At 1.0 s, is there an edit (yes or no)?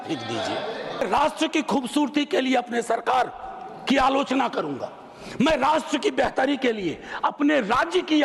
yes